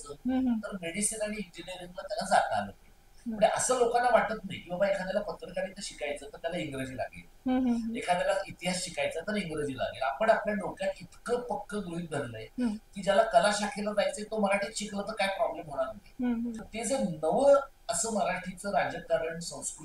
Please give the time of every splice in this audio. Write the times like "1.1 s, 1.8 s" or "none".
16.6 s